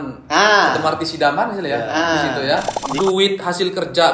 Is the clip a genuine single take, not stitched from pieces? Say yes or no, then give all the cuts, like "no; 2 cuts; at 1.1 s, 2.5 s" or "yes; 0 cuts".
no; 1 cut; at 2.8 s